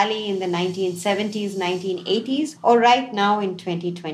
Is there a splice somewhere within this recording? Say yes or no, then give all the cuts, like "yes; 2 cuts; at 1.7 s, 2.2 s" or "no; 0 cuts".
yes; 1 cut; at 2.5 s